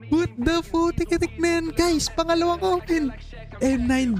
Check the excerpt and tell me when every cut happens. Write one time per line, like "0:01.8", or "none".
none